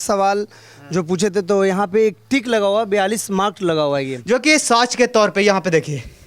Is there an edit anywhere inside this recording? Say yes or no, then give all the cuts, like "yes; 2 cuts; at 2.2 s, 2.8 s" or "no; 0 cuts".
yes; 1 cut; at 4.3 s